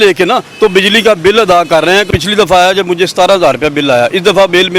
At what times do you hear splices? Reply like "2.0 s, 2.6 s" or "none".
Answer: 2.1 s